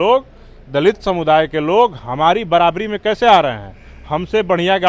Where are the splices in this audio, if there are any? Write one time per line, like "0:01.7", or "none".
none

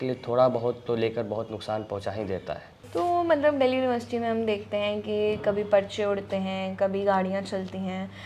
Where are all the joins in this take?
0:02.7

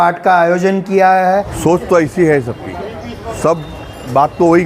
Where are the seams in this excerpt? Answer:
0:01.5
0:03.3

